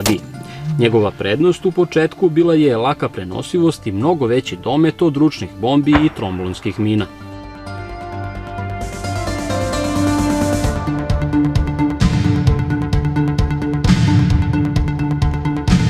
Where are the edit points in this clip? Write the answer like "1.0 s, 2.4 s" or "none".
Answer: 4.5 s